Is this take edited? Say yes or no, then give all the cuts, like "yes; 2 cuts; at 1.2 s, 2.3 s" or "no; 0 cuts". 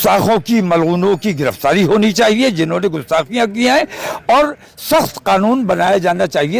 no; 0 cuts